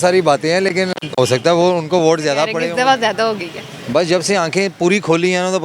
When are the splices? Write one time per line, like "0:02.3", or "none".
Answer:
0:02.6